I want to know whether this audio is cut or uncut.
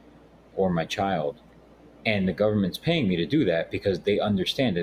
uncut